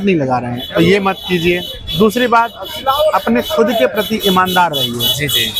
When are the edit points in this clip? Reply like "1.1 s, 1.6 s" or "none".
none